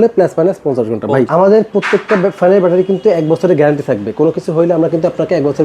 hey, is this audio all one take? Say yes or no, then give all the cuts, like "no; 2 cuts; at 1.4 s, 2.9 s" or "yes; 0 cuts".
no; 1 cut; at 1.3 s